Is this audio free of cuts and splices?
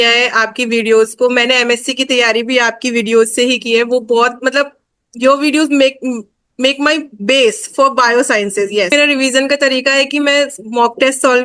no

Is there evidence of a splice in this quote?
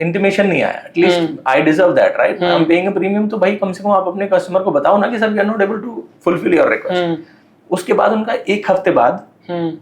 no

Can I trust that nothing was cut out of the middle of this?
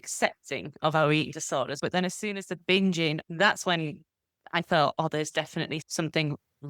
no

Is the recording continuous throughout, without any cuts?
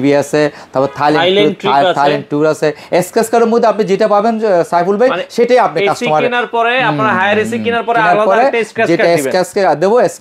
yes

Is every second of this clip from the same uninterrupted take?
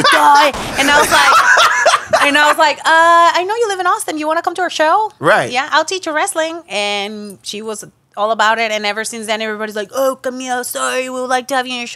yes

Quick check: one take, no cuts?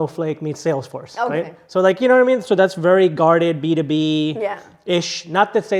yes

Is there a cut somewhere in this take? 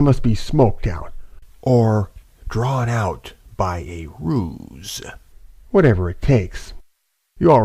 yes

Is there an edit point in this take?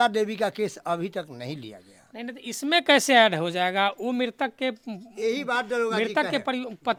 no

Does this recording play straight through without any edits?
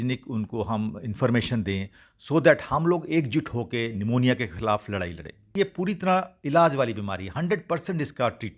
no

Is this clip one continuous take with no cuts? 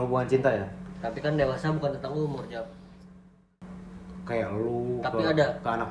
no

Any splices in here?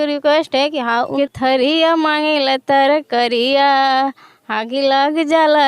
yes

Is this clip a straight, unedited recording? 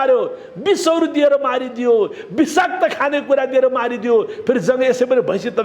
yes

